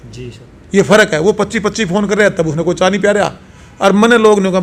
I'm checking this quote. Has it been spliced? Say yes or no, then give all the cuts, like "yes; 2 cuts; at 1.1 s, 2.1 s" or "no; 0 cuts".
no; 0 cuts